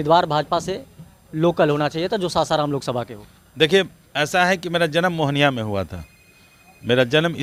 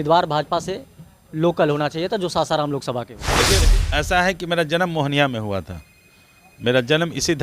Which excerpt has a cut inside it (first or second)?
second